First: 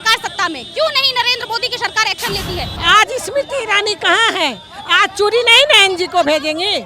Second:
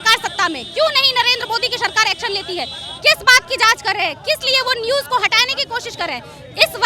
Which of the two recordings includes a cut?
first; 1 cut; at 2.7 s

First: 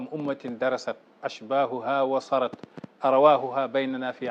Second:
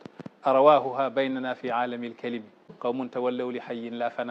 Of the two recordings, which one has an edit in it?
second; 1 cut; at 2.7 s

